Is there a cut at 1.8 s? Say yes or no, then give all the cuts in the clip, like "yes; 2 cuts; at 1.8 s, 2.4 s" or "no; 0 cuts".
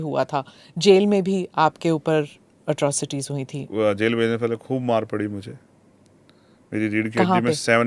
no; 1 cut; at 3.6 s